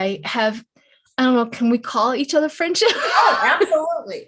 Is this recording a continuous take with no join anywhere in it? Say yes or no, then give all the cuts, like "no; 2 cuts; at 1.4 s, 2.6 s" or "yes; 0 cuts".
yes; 0 cuts